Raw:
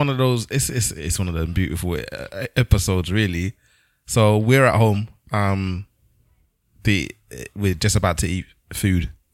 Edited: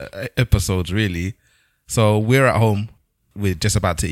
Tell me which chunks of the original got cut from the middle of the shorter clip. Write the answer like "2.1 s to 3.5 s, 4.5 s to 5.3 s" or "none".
5.2 s to 7.2 s